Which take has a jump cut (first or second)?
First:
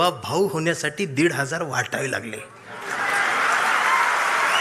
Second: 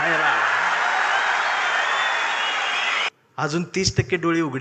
second